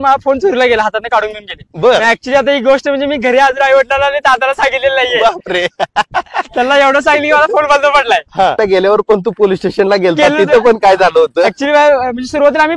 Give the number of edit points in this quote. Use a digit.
1